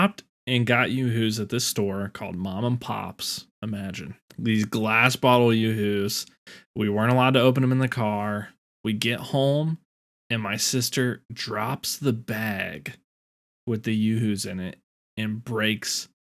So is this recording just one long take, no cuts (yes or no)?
no